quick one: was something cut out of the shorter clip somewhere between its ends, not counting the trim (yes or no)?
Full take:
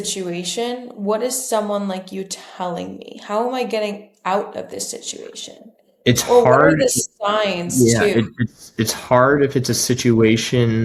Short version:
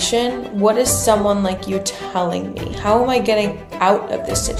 no